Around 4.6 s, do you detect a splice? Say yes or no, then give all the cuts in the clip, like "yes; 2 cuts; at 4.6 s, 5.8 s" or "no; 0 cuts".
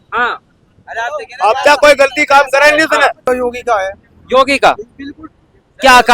no; 1 cut; at 3.2 s